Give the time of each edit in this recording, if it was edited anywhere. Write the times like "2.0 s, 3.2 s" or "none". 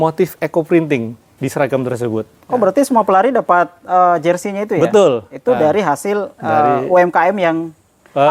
none